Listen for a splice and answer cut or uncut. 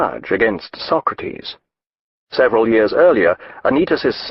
uncut